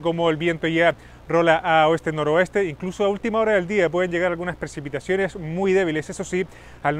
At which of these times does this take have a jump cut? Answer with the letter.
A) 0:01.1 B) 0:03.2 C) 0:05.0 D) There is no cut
A